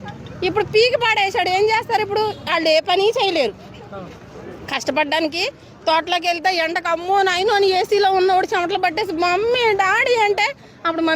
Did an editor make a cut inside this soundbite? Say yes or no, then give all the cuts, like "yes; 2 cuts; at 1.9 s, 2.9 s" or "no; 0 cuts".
no; 0 cuts